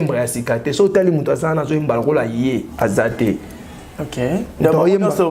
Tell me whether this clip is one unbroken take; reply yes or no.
yes